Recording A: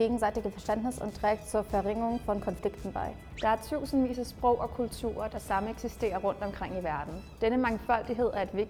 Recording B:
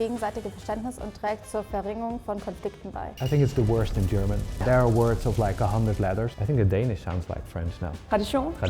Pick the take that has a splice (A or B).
B